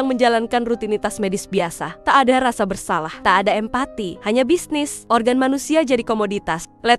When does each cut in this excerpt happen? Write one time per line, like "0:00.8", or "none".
0:01.9
0:03.1
0:04.1
0:05.0